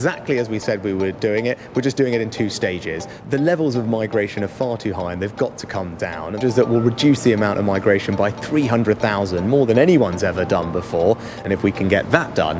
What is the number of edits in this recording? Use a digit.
3